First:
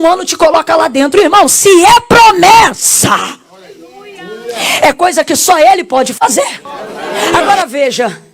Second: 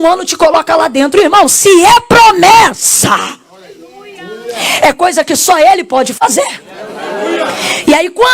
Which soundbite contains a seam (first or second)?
first